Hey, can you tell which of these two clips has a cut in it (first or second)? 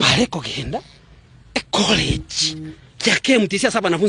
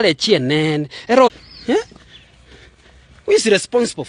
second